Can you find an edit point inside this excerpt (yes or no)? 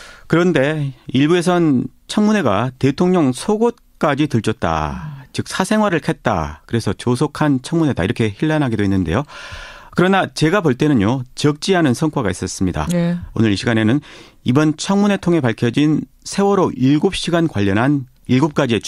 yes